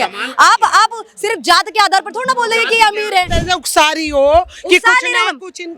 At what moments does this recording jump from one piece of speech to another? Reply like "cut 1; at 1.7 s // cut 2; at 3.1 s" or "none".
cut 1; at 3.3 s